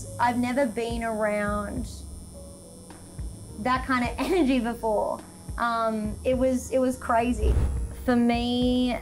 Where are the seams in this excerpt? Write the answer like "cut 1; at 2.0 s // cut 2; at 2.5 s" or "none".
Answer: cut 1; at 7.5 s